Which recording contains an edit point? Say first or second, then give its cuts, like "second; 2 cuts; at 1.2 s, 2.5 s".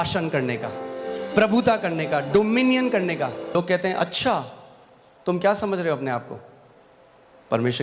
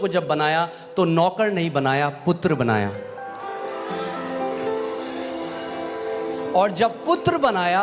first; 1 cut; at 3.5 s